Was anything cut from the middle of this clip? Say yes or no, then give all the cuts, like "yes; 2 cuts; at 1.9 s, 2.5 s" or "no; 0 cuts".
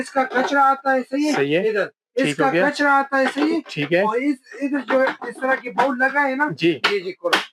no; 0 cuts